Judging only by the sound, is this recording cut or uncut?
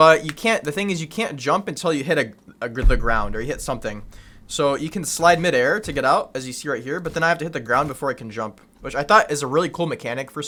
uncut